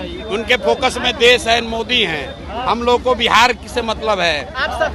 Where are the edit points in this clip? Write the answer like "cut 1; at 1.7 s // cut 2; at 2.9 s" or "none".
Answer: none